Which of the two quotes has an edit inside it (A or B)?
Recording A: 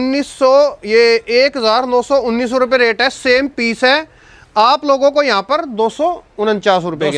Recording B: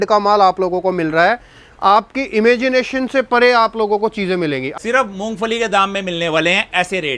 B